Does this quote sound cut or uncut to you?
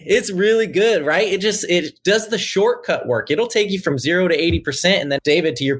uncut